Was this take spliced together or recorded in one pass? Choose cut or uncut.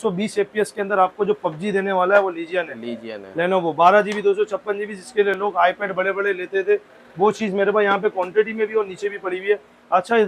uncut